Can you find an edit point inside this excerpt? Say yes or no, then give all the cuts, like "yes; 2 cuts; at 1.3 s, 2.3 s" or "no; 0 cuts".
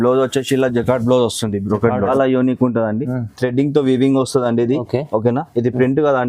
yes; 1 cut; at 2.1 s